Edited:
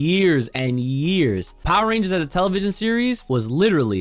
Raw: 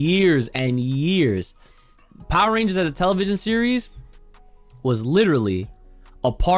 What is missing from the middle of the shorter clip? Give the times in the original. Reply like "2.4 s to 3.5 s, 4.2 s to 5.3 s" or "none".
1.5 s to 2.2 s, 3.9 s to 4.8 s